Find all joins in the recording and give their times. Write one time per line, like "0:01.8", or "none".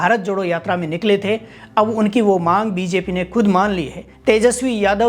none